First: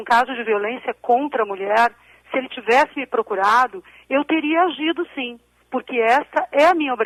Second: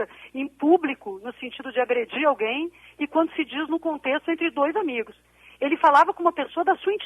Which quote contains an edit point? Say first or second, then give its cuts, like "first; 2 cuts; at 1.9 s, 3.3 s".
second; 1 cut; at 4.3 s